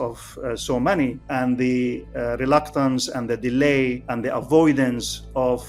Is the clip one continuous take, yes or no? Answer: no